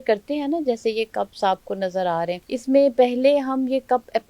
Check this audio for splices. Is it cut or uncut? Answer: cut